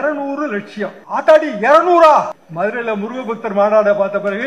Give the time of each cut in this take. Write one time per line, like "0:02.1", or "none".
0:01.0
0:02.4